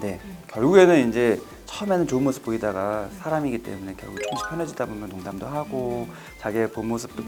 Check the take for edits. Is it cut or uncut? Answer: uncut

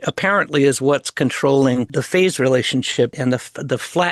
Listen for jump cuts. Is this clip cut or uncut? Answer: cut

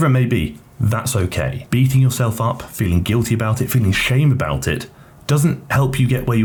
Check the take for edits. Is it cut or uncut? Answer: uncut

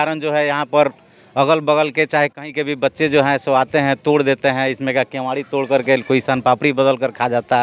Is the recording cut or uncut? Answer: uncut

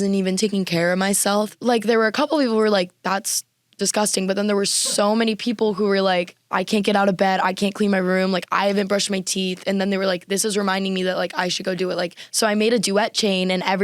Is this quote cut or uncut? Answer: cut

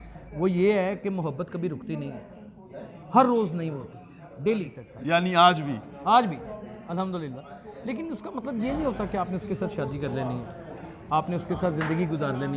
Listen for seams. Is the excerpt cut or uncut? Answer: cut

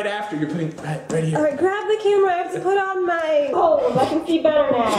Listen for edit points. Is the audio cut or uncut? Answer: uncut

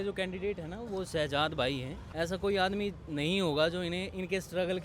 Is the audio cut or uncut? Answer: cut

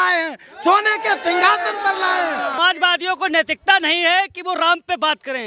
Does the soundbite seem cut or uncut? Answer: cut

